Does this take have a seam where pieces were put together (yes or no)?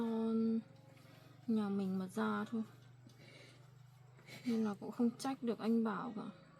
no